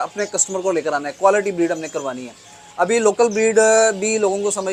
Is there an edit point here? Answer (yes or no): no